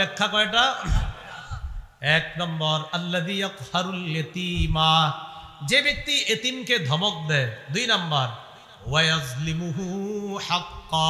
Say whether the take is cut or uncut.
uncut